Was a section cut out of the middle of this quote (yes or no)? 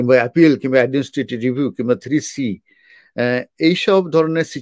no